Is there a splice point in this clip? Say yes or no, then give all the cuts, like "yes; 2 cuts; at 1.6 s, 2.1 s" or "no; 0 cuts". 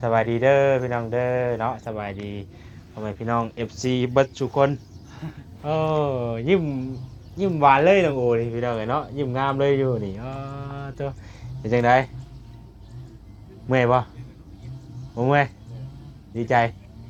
no; 0 cuts